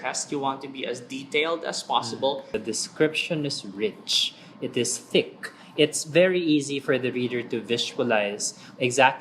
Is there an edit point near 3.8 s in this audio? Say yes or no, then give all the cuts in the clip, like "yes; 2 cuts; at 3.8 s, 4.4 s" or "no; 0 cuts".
no; 1 cut; at 2.5 s